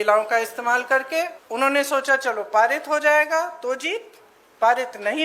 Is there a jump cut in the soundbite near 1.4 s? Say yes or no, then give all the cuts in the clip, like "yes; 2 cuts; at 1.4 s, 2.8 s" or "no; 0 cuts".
yes; 1 cut; at 1.4 s